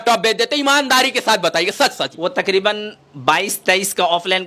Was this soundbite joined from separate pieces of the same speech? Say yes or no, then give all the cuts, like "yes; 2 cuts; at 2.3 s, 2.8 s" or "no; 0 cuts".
yes; 1 cut; at 2.1 s